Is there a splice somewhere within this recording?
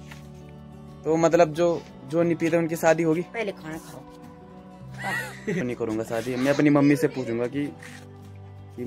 yes; 1 cut; at 5.6 s

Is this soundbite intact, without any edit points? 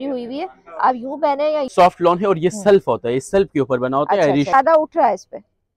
no; 2 cuts; at 1.7 s, 4.5 s

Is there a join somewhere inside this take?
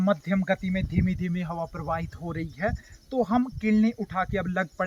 no; 0 cuts

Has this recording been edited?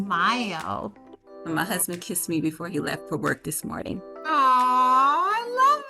no; 0 cuts

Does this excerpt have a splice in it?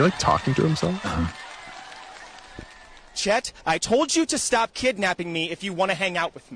no; 0 cuts

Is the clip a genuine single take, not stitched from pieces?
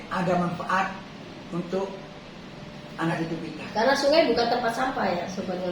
yes; 0 cuts

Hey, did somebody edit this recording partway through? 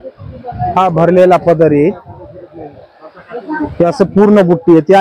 no; 0 cuts

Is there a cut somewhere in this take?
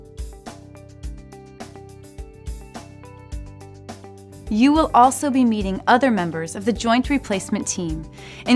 yes; 1 cut; at 6.8 s

